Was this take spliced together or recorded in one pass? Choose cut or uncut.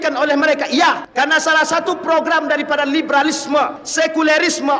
cut